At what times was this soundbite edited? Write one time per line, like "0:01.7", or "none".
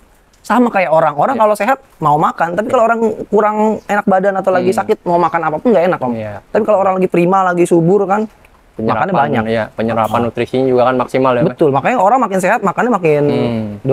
none